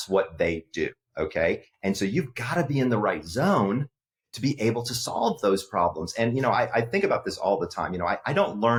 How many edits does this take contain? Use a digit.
0